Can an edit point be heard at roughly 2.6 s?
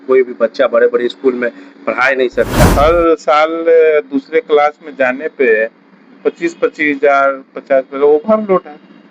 yes; 1 cut; at 2.6 s

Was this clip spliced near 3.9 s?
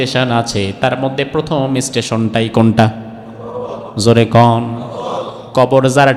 no; 0 cuts

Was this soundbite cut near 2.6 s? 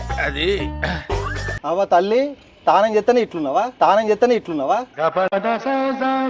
no; 0 cuts

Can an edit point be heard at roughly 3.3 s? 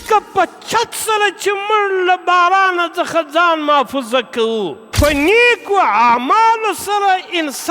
no; 1 cut; at 4.8 s

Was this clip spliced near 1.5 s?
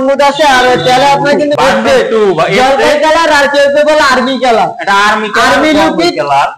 yes; 1 cut; at 1.5 s

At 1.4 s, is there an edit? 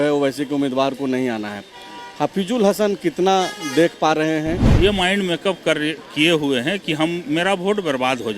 no; 1 cut; at 4.7 s

